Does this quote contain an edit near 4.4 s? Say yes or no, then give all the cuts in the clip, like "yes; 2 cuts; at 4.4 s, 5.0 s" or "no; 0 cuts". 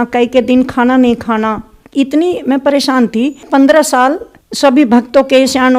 no; 1 cut; at 1.8 s